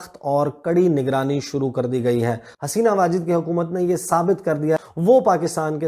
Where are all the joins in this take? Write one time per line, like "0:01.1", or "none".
0:02.5
0:04.8